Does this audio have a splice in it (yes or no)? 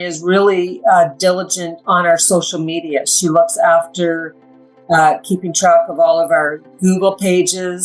no